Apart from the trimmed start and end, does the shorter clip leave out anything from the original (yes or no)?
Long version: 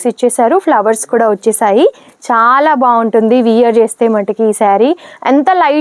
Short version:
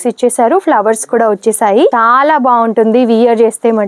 yes